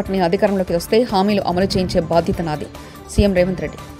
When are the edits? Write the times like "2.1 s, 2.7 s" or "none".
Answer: none